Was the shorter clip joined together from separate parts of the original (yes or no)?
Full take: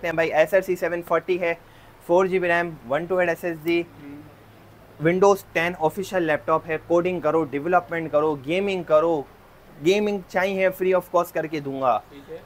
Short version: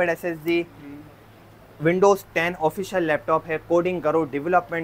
no